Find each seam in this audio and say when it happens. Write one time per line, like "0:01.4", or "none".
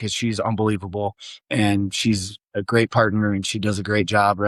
none